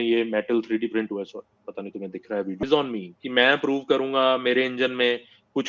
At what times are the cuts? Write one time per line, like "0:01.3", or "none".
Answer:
0:02.6